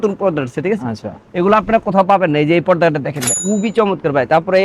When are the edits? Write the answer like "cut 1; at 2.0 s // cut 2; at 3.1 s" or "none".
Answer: cut 1; at 3.3 s